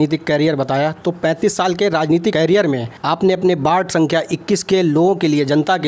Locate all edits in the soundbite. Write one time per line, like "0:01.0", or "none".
none

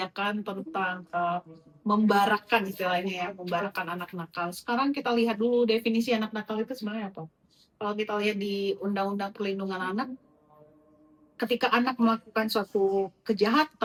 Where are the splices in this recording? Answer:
none

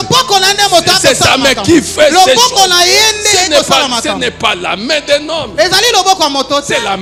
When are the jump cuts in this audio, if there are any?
none

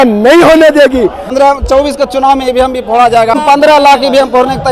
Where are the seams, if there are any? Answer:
0:01.3
0:03.3

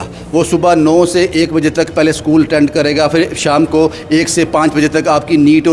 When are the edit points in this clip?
none

